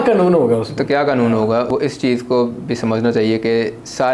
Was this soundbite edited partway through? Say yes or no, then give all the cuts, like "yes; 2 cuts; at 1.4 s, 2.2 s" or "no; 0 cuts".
yes; 1 cut; at 1.7 s